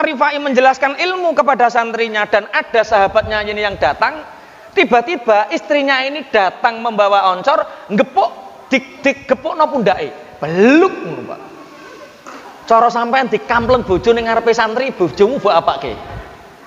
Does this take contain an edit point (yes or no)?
no